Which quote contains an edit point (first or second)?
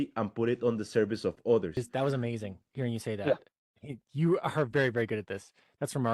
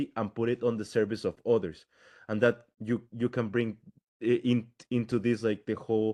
first